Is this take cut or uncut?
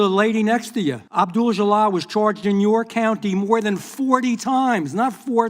cut